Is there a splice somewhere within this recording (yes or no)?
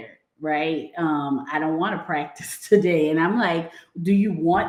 no